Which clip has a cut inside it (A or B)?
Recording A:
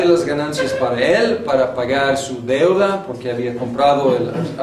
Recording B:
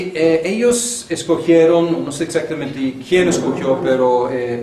A